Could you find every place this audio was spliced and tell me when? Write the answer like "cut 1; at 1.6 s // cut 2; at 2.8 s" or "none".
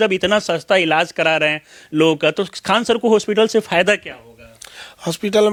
none